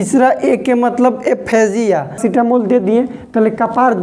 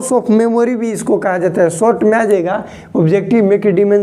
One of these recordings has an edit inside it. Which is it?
first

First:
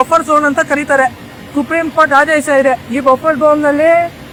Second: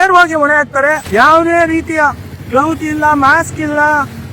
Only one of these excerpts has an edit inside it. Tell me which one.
second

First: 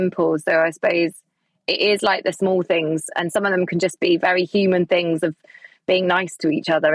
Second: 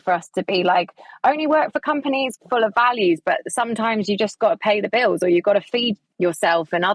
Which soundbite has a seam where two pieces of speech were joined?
second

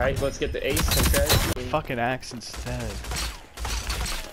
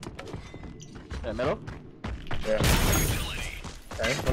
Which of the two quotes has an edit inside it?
first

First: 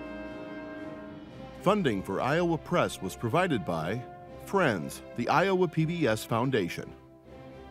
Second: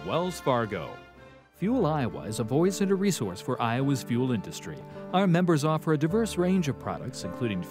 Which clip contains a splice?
first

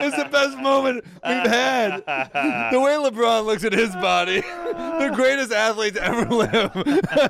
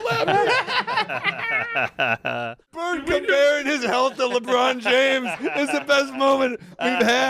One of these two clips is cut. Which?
second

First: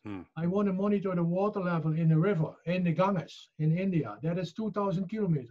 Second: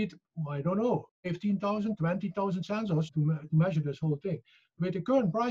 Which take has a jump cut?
second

